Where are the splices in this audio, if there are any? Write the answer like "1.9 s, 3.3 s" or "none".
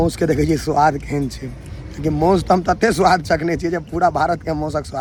none